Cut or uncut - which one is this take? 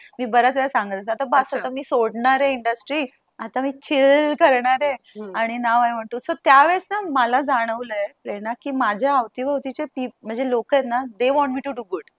uncut